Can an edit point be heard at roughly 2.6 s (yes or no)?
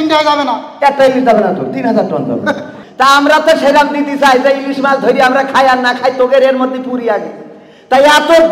yes